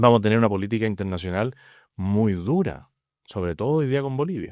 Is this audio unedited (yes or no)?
yes